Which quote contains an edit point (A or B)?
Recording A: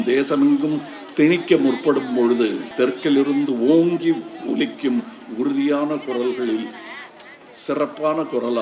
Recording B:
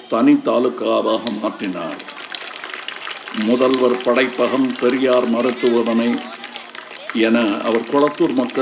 A